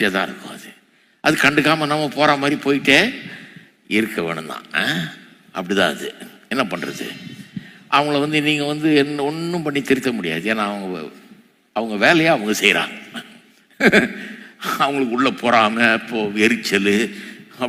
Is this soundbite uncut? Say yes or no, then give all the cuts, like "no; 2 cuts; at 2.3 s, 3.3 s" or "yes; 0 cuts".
yes; 0 cuts